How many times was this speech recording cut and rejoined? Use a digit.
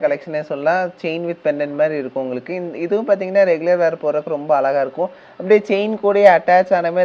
0